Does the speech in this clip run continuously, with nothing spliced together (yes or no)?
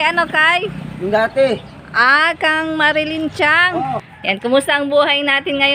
no